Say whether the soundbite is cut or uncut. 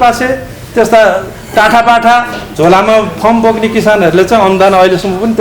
uncut